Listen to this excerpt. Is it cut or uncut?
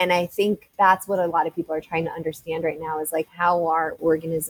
uncut